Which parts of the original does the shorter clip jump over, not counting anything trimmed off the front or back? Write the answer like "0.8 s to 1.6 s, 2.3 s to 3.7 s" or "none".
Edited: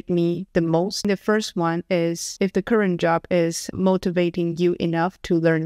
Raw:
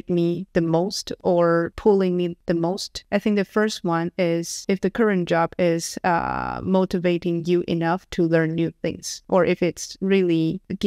1.1 s to 3.3 s, 5.9 s to 6.5 s